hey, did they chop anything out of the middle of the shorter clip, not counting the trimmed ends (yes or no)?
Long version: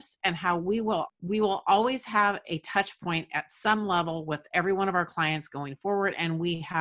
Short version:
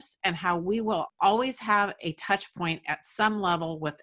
yes